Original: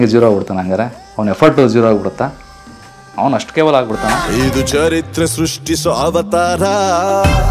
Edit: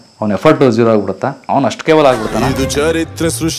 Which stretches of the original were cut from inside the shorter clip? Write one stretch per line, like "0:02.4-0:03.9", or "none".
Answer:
0:02.3-0:03.1
0:04.0-0:04.3